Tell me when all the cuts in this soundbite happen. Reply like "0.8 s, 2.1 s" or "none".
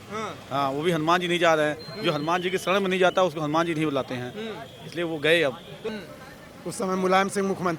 5.7 s

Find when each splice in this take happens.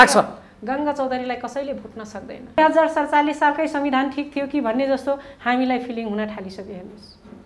2.6 s

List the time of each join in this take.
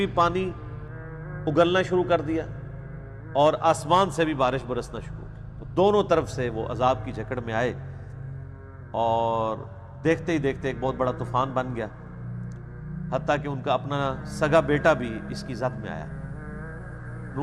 none

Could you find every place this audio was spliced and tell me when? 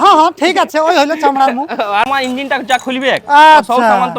2.1 s

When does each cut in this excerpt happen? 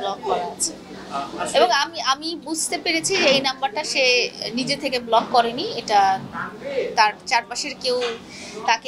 none

